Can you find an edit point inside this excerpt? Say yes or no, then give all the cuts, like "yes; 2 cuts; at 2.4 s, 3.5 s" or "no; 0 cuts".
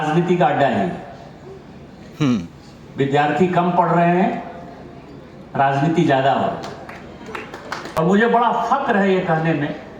yes; 1 cut; at 7.8 s